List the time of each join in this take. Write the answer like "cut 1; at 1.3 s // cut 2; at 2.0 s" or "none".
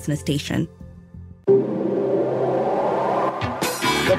cut 1; at 1.0 s